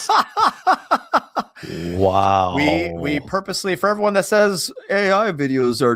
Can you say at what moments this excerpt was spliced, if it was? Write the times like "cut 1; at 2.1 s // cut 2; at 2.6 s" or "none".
none